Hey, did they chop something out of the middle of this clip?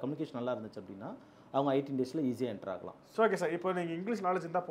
yes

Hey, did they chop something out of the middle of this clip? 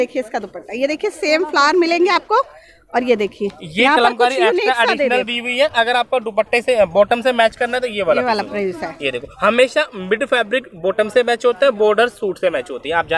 no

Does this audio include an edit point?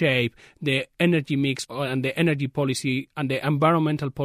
yes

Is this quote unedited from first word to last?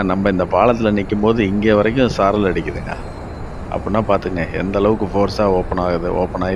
yes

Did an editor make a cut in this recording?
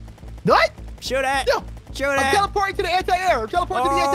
no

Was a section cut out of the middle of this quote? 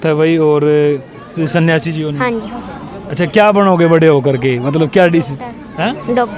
yes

